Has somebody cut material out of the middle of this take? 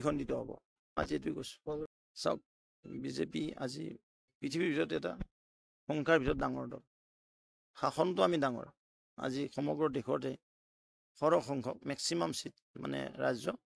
yes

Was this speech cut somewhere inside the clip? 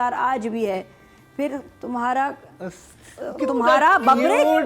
no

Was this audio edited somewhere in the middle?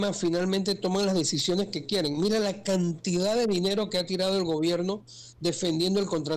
no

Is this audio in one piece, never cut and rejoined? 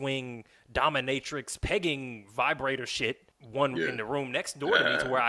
no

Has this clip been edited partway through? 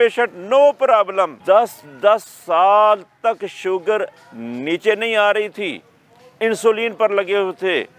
yes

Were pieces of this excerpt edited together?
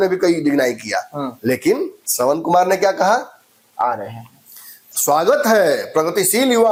no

